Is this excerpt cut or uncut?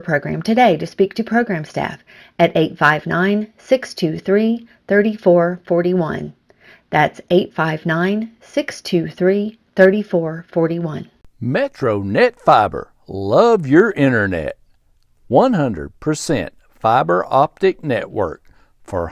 cut